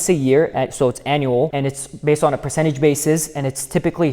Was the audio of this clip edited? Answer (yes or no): yes